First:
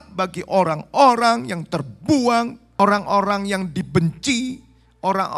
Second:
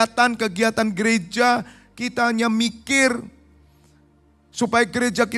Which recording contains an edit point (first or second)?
first